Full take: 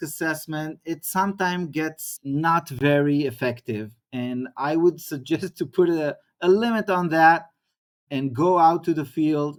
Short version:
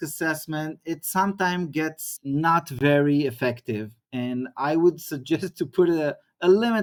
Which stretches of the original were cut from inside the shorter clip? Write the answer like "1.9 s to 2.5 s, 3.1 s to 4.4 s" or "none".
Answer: none